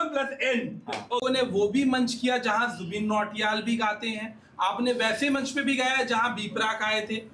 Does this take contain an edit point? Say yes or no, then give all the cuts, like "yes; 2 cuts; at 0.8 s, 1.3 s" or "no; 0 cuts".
yes; 1 cut; at 1.2 s